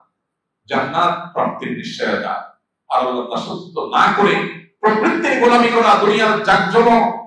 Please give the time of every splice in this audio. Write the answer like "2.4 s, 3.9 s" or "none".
none

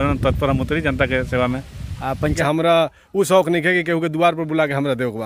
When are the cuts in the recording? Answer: 2.4 s

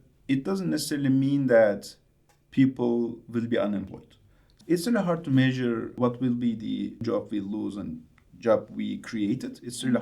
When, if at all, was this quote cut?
4.6 s

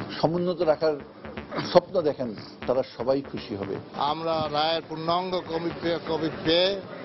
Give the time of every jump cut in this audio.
3.9 s

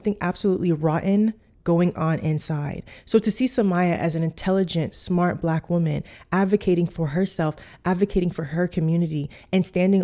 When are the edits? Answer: none

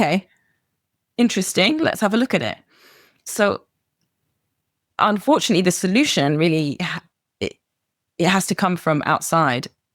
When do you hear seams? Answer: none

